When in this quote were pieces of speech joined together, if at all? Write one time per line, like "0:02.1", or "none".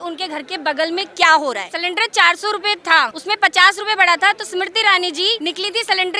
0:01.7
0:03.2
0:05.4